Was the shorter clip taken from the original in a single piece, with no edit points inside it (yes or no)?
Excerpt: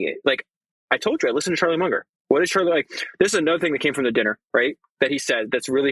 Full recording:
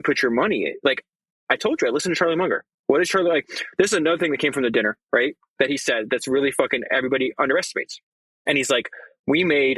yes